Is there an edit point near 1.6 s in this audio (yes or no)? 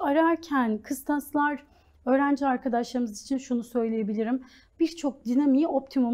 no